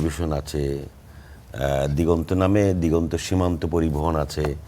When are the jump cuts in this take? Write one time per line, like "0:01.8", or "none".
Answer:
none